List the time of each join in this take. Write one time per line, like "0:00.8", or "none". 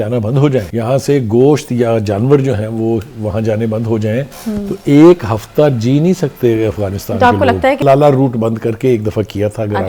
0:07.8